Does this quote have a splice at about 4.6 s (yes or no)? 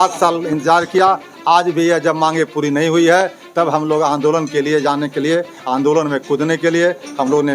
no